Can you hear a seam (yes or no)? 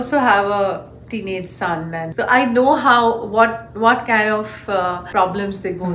yes